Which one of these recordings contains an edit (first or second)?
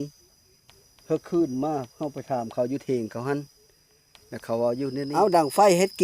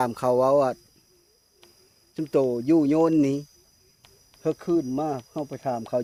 first